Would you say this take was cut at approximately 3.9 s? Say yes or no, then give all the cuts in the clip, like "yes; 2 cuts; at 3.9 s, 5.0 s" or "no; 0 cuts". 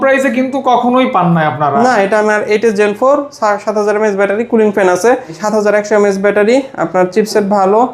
no; 2 cuts; at 2.3 s, 5.4 s